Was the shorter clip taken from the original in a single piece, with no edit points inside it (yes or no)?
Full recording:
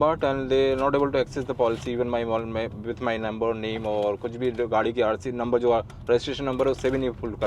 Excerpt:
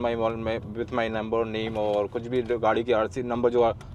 yes